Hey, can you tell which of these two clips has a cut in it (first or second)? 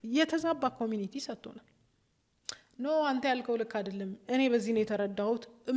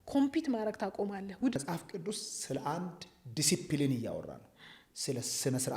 second